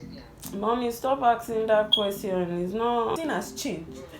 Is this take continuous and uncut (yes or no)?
no